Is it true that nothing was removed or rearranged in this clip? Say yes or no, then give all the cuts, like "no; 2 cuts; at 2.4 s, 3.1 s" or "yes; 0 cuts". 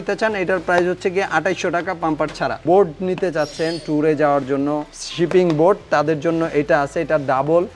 no; 1 cut; at 2.6 s